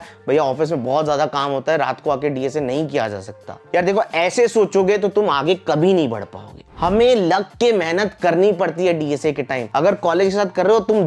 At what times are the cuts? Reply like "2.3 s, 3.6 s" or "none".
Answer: none